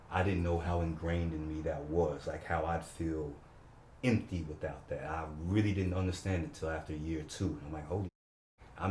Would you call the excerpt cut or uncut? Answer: uncut